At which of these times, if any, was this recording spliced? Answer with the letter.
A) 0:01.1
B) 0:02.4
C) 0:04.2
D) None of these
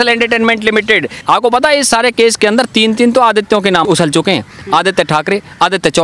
A